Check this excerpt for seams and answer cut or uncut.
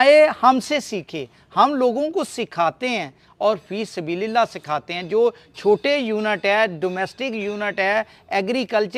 uncut